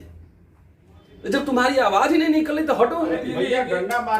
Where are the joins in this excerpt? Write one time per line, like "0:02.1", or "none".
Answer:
0:03.2